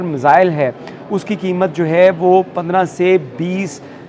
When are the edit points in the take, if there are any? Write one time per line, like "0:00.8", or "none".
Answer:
none